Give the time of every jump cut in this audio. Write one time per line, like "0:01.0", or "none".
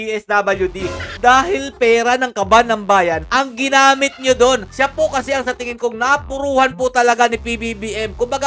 0:01.1
0:04.7